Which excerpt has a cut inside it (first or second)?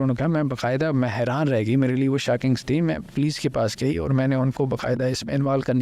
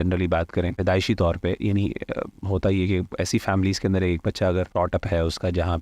second